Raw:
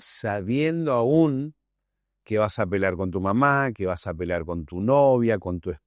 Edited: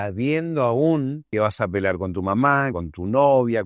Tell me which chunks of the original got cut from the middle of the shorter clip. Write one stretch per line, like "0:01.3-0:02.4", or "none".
0:01.5-0:02.2
0:03.7-0:04.5